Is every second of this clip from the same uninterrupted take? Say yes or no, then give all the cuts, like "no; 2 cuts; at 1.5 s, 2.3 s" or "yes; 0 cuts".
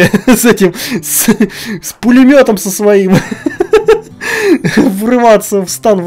yes; 0 cuts